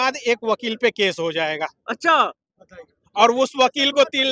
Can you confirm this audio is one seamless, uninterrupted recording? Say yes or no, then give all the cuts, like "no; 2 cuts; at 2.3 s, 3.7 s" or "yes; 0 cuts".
yes; 0 cuts